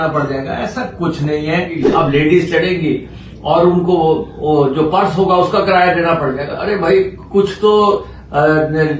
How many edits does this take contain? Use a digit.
1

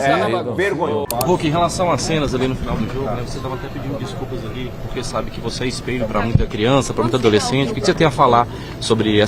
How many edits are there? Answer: 1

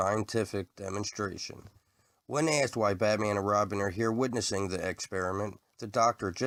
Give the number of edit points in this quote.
0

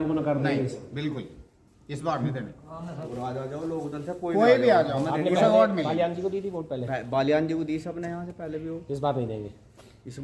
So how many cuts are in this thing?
1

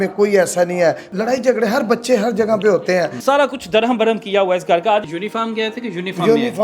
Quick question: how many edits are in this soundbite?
3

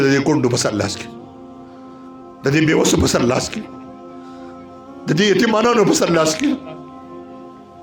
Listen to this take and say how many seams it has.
0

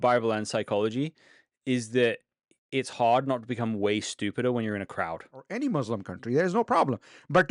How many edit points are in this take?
1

